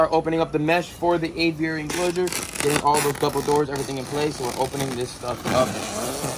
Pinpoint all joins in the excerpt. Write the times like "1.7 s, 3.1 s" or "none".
none